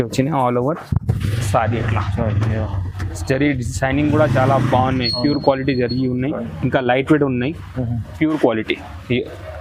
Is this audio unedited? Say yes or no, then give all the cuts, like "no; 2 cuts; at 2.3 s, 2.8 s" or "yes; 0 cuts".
yes; 0 cuts